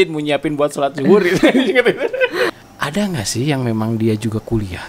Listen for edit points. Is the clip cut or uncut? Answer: cut